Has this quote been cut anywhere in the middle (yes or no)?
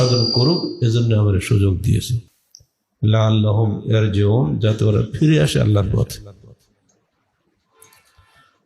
no